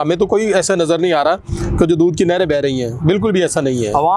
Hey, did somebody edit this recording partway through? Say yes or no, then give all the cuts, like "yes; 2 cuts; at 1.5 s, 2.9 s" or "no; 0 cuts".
no; 0 cuts